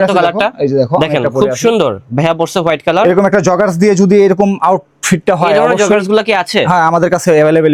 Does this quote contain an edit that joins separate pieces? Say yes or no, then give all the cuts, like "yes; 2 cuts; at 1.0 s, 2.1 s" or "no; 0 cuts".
no; 0 cuts